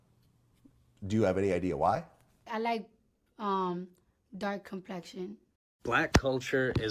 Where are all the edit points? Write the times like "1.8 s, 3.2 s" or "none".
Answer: 2.4 s, 5.7 s